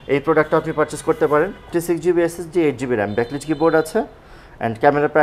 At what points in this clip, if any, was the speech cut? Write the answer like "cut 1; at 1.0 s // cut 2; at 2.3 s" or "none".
cut 1; at 1.7 s